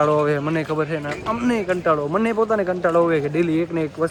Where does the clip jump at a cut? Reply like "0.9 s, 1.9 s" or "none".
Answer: none

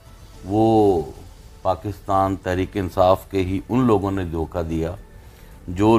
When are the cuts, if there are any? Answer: none

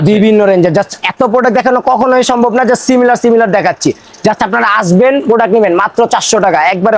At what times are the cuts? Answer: none

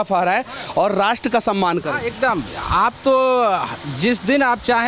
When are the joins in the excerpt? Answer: none

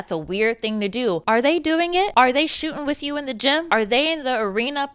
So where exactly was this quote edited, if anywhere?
2.1 s, 3.6 s

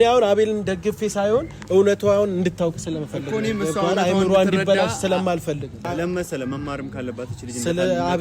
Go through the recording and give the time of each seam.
5.9 s

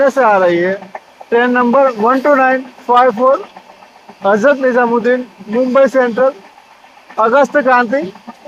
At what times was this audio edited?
none

